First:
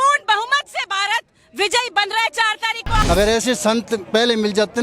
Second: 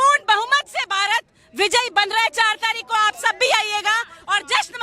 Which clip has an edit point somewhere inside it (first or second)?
first